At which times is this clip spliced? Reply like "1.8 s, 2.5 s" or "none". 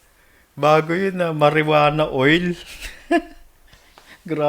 none